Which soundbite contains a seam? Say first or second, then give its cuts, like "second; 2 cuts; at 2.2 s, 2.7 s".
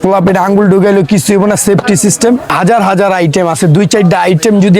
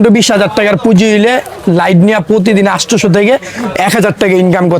first; 1 cut; at 2.5 s